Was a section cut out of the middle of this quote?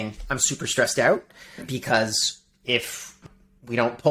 yes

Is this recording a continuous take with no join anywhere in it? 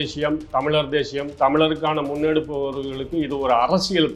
yes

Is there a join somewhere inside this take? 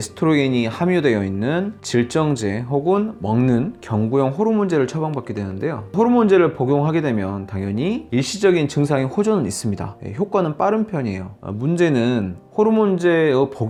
no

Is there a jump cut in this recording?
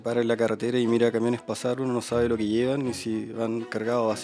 no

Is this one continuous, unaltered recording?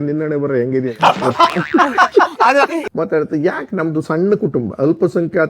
no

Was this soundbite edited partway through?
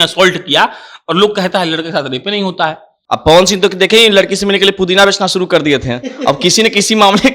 yes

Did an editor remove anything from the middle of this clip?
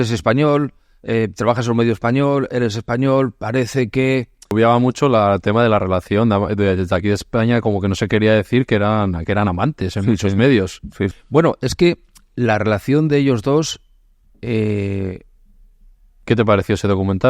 yes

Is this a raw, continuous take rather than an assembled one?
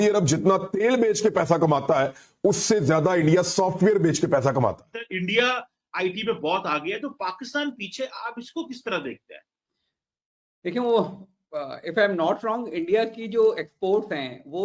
no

